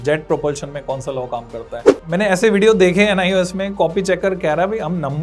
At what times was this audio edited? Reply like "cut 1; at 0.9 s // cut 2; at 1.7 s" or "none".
cut 1; at 1.9 s